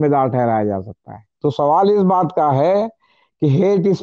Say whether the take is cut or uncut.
cut